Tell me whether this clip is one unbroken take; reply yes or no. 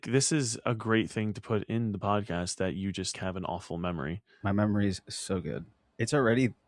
no